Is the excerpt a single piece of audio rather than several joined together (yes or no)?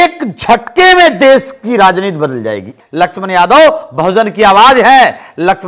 no